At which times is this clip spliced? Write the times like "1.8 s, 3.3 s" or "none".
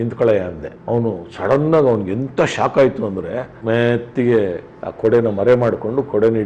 3.5 s